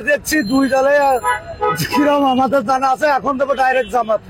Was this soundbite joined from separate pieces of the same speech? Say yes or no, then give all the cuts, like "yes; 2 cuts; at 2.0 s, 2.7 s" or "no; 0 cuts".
no; 0 cuts